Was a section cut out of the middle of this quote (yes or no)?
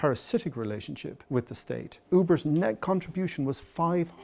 yes